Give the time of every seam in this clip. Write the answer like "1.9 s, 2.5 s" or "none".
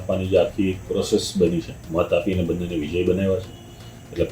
1.8 s